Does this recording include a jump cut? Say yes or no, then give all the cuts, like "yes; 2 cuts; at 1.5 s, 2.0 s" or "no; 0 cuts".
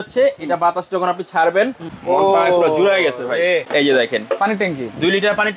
yes; 2 cuts; at 1.9 s, 3.7 s